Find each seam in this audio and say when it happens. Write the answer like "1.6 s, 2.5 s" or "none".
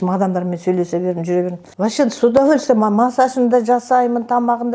1.6 s